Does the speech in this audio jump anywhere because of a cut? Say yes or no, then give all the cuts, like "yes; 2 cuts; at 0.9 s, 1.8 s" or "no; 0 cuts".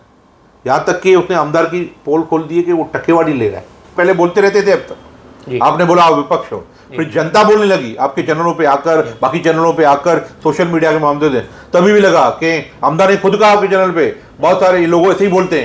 yes; 1 cut; at 3.9 s